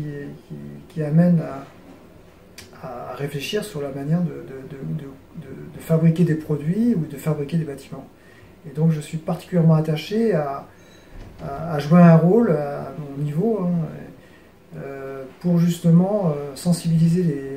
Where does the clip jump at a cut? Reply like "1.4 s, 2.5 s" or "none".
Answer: none